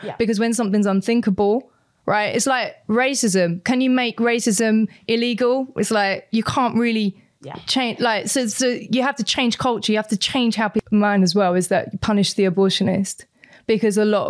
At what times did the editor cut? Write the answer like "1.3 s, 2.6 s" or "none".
10.8 s

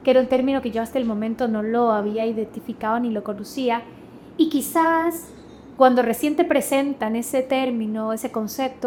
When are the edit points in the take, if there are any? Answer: none

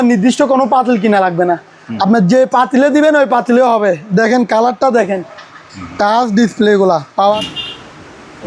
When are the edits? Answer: 7.4 s

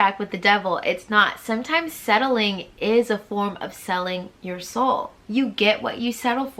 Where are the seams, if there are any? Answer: 5.2 s

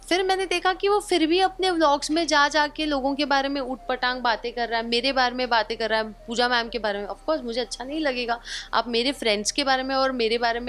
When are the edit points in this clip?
none

